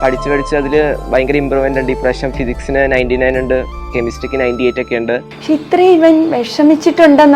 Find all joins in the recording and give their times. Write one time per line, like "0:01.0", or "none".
0:05.3